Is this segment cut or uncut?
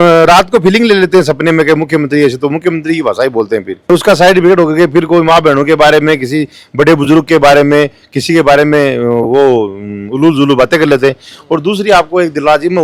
uncut